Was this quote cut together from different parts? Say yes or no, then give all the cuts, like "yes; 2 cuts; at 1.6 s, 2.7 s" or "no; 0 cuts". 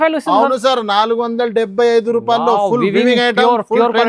no; 0 cuts